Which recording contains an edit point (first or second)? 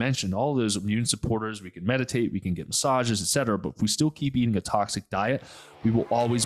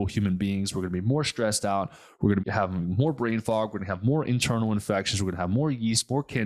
second